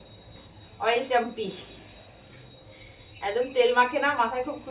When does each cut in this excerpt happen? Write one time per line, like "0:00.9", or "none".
none